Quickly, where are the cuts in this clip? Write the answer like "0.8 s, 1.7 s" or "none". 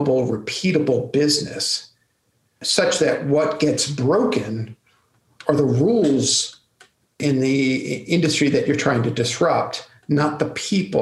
2.6 s, 7.2 s

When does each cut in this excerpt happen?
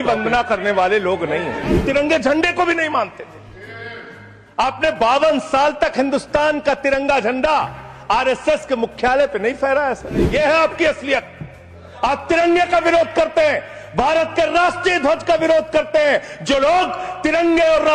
1.8 s, 10.3 s

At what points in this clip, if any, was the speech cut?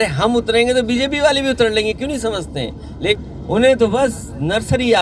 3.1 s

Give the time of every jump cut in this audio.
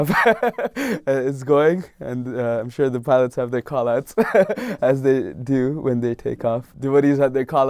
6.7 s

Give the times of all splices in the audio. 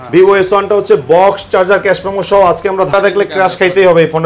2.9 s

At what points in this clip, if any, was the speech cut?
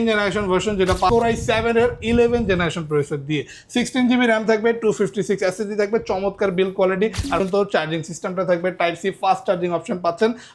1.1 s, 7.4 s

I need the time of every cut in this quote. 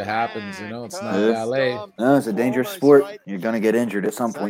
1.9 s, 3.2 s

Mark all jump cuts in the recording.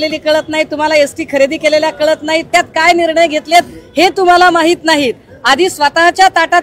none

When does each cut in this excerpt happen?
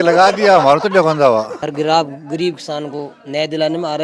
1.6 s

